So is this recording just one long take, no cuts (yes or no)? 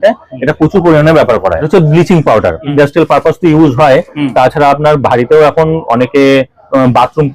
no